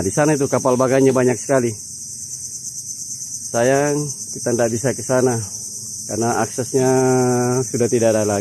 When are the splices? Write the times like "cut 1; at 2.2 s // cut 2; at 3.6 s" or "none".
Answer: none